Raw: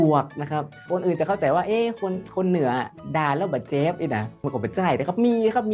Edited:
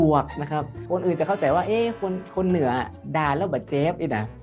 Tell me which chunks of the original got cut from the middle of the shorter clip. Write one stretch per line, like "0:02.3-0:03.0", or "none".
none